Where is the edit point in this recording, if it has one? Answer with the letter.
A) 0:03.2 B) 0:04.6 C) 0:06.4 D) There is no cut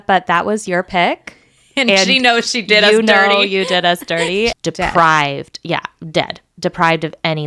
B